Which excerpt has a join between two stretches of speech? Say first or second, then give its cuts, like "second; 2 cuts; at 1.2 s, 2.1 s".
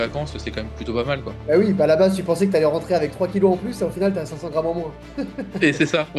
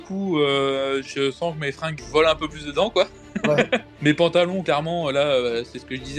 second; 2 cuts; at 1.9 s, 3.9 s